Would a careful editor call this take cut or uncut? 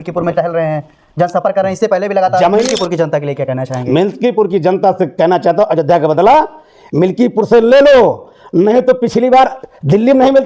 cut